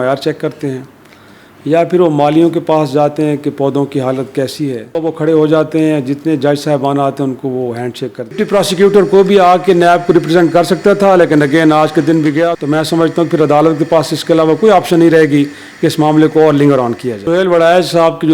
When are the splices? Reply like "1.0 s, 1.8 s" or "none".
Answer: 5.0 s, 8.4 s, 12.6 s, 17.2 s